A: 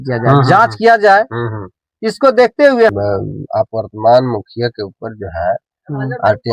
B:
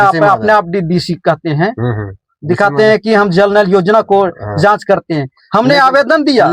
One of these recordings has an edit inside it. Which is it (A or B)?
A